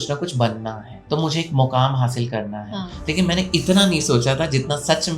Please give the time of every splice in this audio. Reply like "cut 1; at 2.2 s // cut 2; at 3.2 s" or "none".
cut 1; at 0.9 s